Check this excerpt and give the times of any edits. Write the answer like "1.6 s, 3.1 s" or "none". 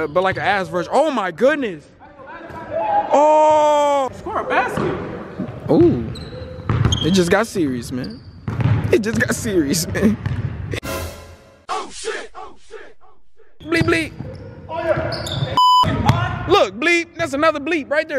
4.1 s, 10.8 s, 13.6 s